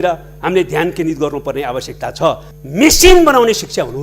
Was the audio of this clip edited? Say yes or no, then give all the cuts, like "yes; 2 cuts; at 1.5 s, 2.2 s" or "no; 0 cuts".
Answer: yes; 1 cut; at 2.5 s